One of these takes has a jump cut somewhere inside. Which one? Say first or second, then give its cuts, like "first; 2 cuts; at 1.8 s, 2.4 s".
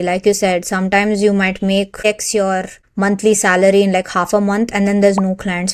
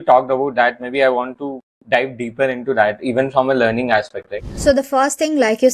second; 1 cut; at 4.5 s